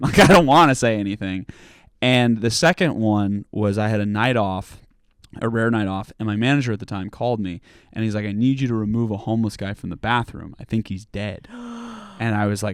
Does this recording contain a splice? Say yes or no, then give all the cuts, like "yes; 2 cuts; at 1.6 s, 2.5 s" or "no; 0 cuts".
no; 0 cuts